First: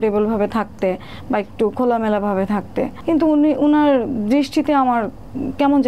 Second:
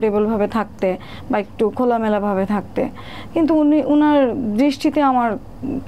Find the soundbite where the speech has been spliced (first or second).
first